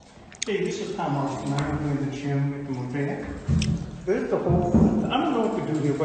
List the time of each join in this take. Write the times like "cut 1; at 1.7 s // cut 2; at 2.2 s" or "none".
none